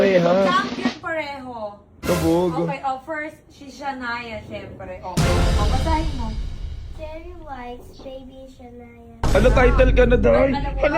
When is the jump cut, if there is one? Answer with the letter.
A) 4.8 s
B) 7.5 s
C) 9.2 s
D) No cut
C